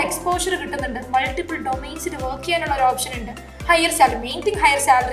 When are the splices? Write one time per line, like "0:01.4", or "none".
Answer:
none